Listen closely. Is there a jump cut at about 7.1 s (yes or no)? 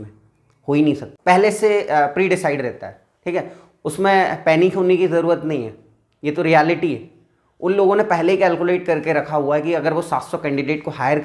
no